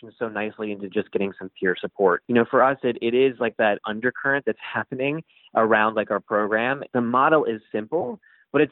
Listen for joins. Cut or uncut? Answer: cut